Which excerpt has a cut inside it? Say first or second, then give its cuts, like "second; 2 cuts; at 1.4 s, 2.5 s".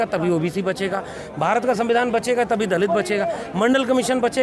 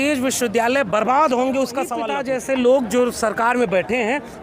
second; 1 cut; at 2.1 s